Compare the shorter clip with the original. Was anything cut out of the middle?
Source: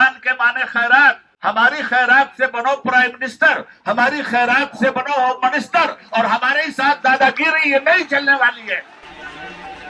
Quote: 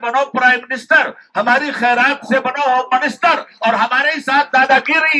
no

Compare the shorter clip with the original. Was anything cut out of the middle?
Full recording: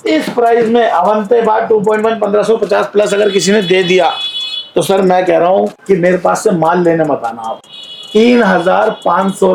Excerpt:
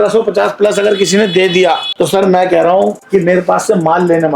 yes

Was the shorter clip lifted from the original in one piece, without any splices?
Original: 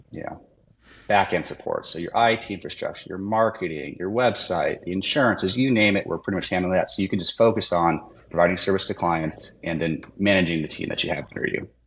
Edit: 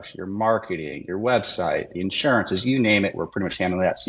yes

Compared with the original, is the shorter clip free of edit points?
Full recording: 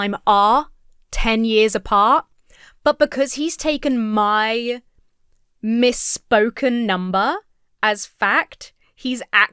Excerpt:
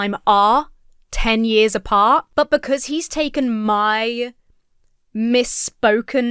no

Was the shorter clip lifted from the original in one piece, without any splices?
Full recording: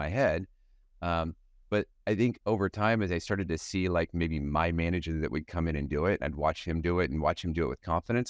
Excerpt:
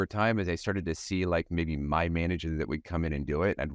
yes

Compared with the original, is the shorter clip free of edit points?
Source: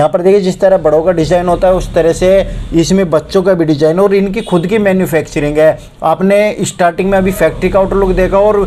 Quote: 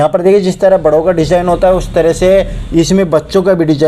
yes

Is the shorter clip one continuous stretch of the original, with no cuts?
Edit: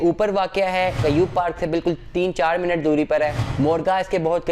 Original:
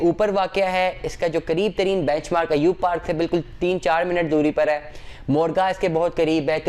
no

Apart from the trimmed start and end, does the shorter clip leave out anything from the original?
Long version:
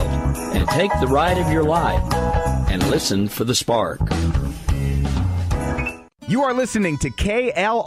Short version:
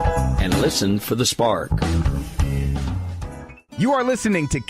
yes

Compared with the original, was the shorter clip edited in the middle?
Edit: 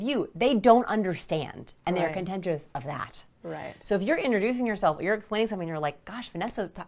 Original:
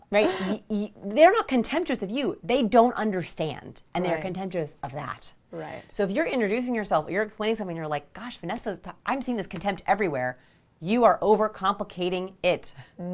no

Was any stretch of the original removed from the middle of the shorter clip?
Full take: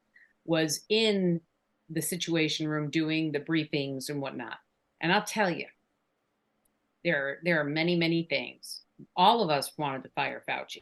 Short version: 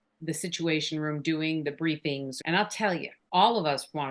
yes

